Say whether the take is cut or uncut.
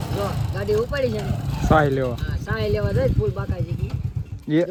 uncut